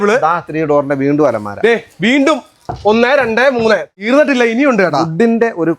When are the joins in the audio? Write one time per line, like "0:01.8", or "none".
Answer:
0:03.9